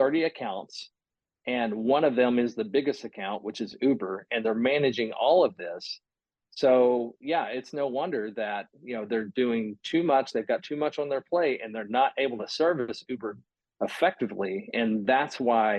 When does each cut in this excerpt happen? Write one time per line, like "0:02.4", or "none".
none